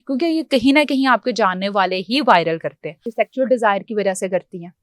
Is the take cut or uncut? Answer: cut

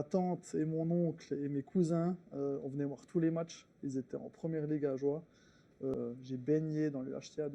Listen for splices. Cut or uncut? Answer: cut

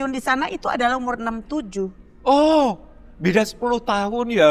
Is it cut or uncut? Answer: uncut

